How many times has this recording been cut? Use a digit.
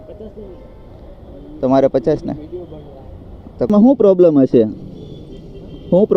1